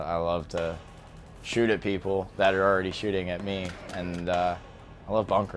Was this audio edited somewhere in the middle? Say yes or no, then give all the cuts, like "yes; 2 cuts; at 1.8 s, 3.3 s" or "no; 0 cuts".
no; 0 cuts